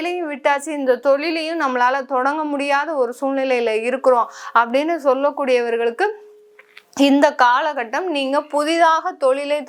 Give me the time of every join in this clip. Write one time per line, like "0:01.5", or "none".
none